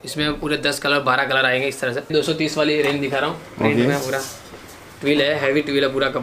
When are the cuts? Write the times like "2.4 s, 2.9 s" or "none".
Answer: 2.1 s

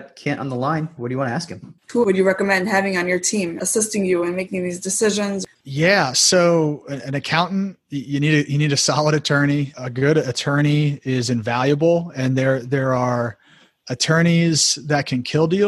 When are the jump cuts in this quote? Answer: 1.9 s, 3.6 s, 5.4 s

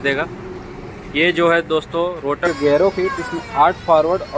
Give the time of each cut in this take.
2.4 s

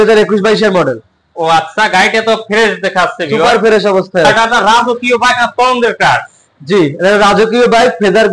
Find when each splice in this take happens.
4.3 s

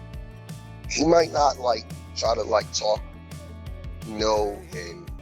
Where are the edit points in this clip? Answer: 0.9 s

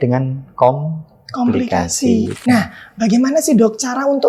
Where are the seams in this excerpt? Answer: 2.3 s

